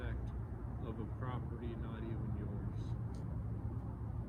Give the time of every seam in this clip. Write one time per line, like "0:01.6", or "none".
none